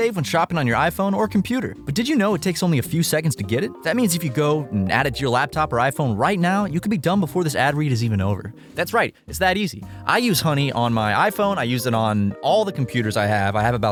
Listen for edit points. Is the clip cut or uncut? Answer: uncut